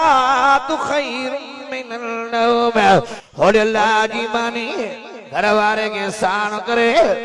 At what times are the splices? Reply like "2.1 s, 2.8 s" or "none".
3.2 s